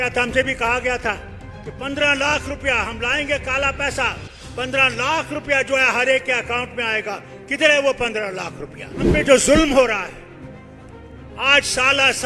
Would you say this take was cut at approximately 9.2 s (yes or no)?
yes